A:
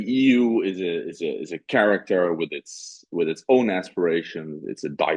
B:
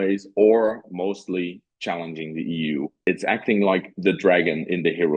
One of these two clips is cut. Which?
B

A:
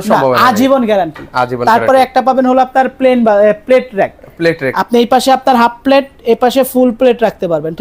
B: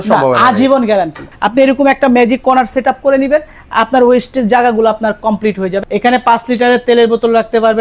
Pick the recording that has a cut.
B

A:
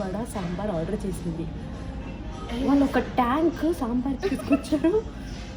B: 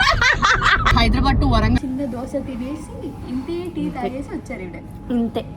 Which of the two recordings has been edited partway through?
B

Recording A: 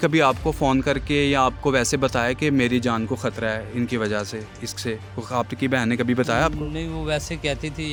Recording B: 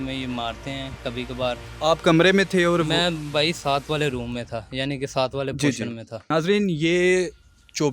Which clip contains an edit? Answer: B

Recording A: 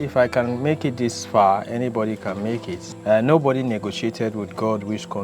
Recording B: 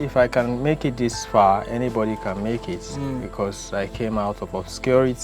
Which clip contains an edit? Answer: A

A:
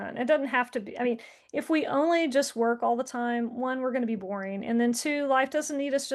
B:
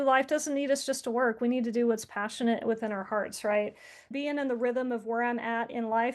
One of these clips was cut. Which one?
B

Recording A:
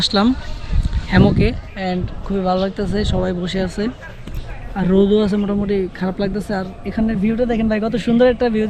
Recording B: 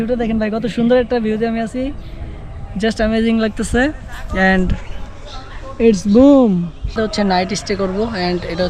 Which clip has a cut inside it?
B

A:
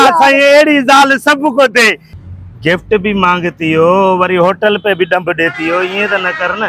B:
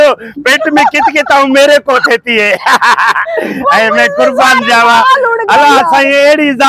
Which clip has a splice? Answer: A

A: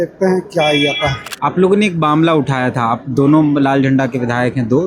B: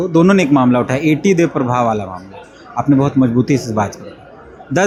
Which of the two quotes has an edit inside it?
A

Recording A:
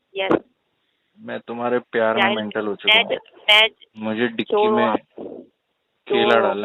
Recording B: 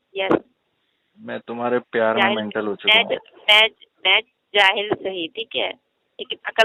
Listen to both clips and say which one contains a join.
A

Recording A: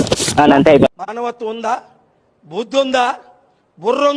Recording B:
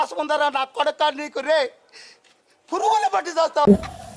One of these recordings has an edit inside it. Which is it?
A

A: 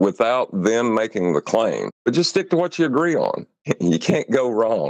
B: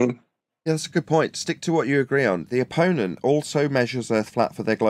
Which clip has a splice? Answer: A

